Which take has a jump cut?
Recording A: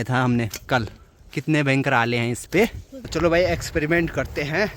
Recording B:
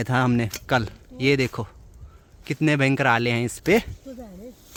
A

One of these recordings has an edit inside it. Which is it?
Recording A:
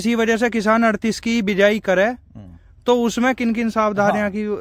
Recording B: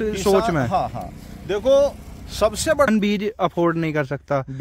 B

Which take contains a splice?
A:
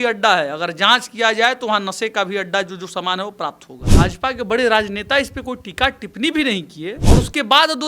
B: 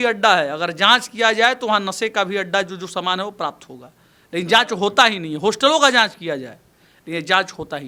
A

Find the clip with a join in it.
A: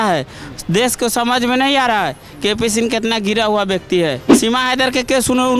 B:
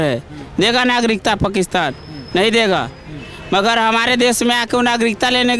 A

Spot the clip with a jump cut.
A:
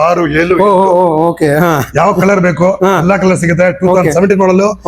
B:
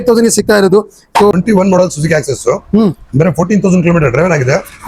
B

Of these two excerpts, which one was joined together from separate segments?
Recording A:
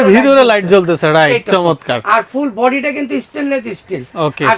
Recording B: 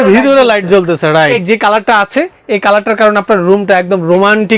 B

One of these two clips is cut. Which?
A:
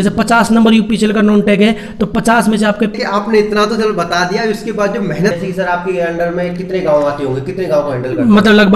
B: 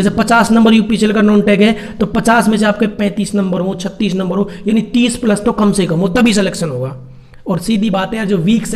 A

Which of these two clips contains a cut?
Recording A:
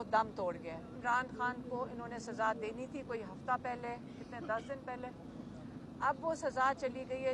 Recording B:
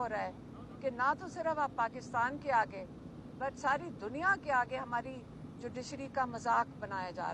A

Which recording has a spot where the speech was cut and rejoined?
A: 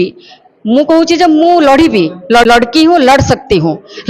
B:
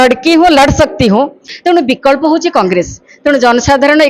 B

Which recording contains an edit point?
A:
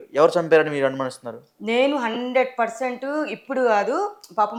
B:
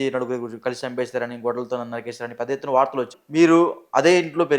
B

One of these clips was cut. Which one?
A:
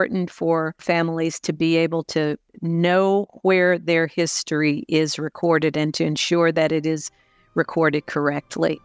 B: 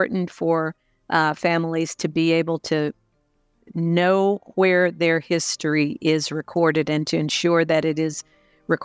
A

